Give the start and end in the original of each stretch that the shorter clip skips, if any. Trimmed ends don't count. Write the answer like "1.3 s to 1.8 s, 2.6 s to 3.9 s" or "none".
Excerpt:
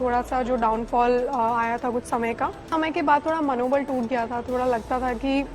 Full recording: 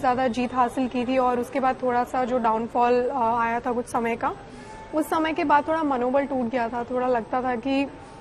4.5 s to 5.1 s